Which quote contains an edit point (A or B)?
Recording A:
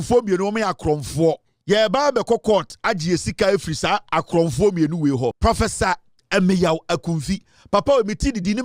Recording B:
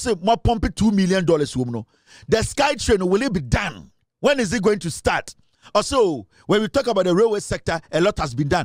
A